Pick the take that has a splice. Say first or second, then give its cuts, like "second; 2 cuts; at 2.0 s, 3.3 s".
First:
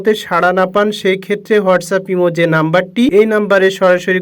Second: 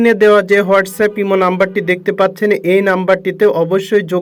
first; 1 cut; at 3.1 s